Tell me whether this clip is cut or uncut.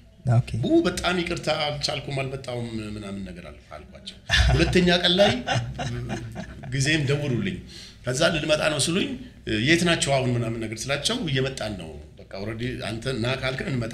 uncut